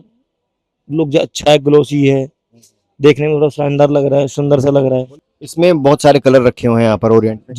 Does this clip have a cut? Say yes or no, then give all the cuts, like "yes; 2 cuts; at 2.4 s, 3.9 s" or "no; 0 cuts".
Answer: yes; 1 cut; at 5.2 s